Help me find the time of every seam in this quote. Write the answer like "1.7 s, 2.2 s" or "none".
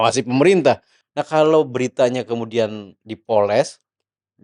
1.0 s